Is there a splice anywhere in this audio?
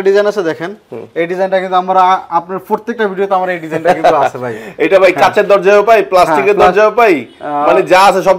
no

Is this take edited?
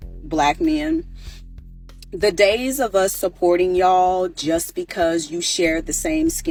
no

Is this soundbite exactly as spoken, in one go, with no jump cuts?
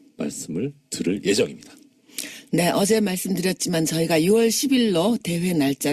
no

